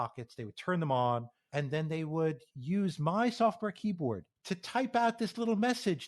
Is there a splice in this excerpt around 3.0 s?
no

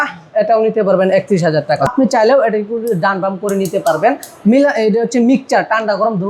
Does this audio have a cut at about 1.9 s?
yes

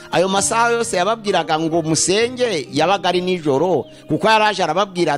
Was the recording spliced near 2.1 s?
no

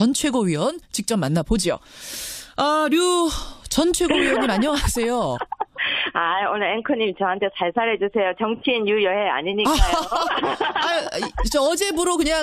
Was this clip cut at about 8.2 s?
no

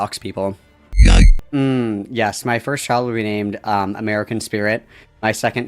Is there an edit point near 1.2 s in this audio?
yes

